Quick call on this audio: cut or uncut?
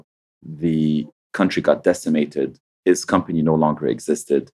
uncut